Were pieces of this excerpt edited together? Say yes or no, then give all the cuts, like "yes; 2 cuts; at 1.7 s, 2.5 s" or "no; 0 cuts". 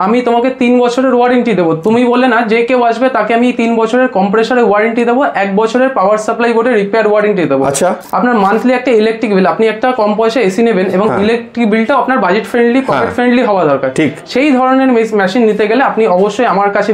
yes; 1 cut; at 8.0 s